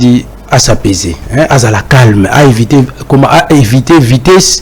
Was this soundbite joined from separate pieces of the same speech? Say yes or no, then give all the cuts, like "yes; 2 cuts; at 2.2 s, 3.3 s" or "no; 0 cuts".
yes; 1 cut; at 1.2 s